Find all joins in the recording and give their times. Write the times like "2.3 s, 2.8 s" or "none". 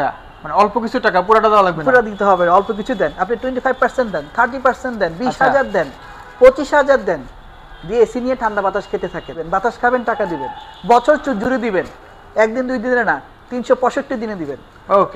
9.4 s